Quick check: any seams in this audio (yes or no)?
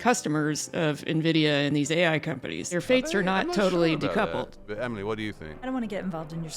yes